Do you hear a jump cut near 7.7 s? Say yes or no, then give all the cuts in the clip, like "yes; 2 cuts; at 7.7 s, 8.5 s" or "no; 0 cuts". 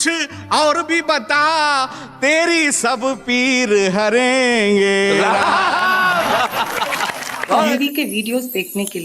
yes; 1 cut; at 7.7 s